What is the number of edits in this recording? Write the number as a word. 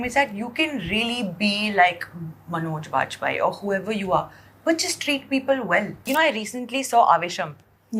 one